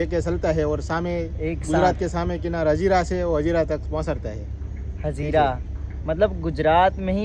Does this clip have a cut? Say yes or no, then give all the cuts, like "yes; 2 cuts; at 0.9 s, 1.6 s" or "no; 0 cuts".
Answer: no; 0 cuts